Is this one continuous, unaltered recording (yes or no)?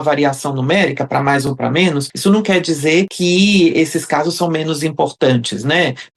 no